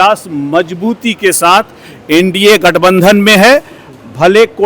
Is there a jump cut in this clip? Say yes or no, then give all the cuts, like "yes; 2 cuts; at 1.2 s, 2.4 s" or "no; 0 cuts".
no; 0 cuts